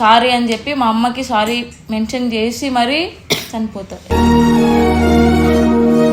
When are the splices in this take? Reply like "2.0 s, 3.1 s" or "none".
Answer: none